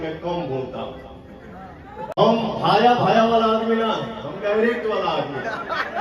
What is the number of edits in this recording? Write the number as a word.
one